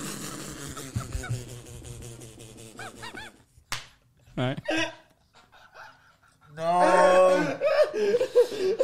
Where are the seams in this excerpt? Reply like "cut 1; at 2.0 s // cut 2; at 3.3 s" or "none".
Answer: none